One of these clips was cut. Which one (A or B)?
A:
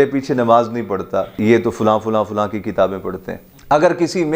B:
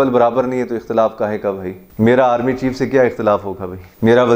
A